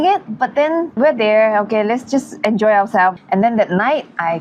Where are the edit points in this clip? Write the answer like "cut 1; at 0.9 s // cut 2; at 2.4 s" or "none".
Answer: cut 1; at 1.0 s // cut 2; at 3.1 s